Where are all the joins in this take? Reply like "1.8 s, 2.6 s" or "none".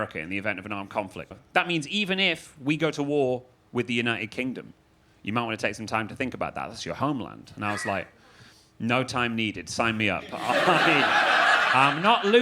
1.3 s